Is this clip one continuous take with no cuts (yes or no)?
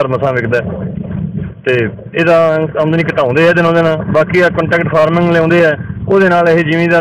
yes